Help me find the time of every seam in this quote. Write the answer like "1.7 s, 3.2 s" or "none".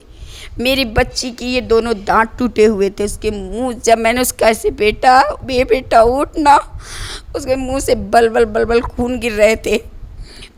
none